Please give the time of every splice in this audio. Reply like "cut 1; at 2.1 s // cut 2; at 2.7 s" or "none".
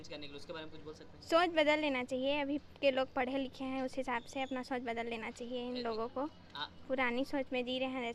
none